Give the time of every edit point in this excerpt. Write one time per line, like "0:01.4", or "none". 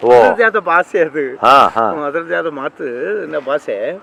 none